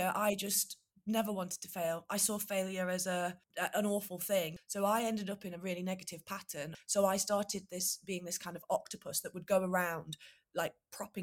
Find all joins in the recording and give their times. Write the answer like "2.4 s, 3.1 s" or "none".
3.4 s, 4.6 s, 6.7 s

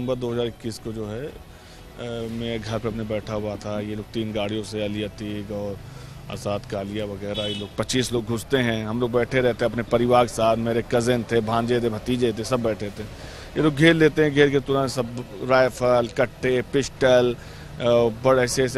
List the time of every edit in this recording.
none

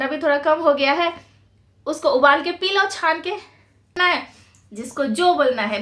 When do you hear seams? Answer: 4.0 s

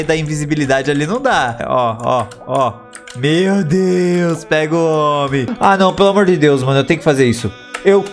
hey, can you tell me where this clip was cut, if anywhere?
1.6 s, 5.5 s

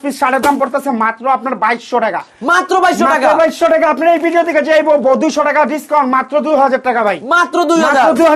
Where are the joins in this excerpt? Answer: none

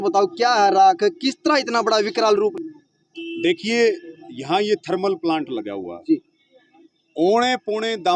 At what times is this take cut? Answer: 2.5 s

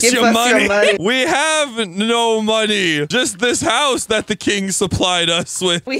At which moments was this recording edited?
1.0 s

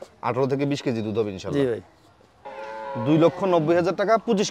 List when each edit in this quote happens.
2.2 s

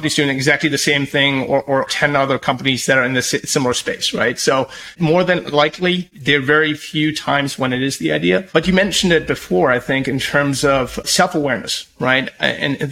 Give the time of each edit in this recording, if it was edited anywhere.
1.9 s, 4.9 s, 6.1 s, 8.5 s, 11.0 s

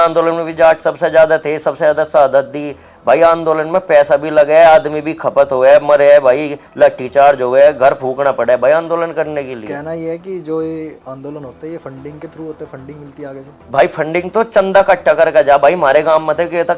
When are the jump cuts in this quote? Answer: none

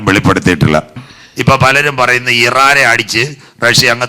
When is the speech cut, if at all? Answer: 0.9 s

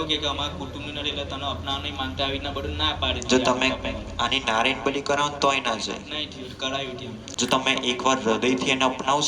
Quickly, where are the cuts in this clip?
7.3 s

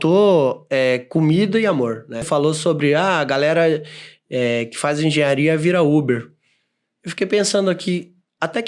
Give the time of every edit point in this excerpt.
2.3 s

